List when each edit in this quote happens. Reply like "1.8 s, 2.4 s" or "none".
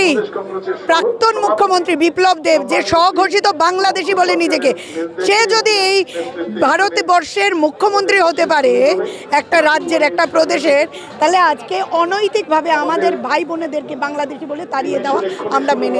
none